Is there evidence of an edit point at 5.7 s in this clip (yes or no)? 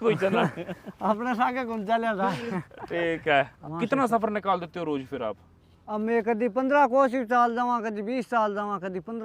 no